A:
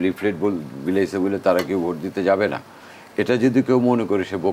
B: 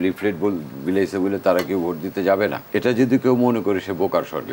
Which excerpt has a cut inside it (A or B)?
B